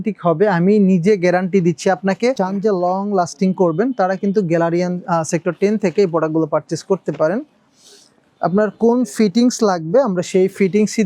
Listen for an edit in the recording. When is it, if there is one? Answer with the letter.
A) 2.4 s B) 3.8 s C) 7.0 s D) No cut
A